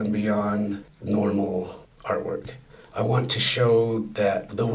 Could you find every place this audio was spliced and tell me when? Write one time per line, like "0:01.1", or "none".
0:00.9
0:01.9